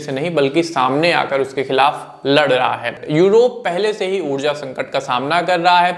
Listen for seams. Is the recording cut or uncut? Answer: cut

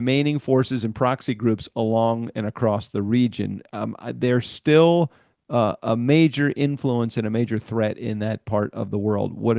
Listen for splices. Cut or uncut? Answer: uncut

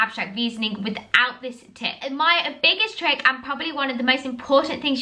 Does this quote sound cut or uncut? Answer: cut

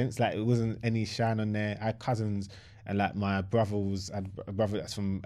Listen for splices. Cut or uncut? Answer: uncut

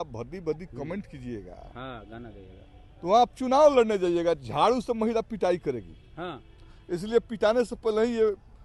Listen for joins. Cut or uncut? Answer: uncut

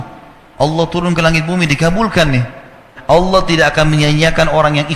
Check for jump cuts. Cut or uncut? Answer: cut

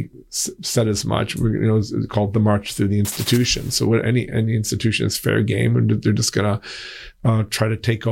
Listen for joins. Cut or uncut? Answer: uncut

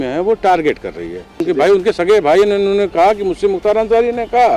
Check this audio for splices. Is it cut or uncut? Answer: cut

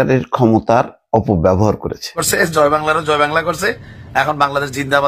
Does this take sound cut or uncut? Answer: cut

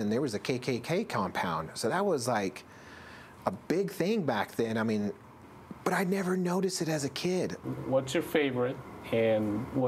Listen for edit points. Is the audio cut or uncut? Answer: cut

